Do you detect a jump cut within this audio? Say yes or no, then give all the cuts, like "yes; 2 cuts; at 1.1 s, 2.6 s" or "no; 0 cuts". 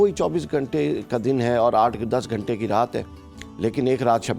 no; 0 cuts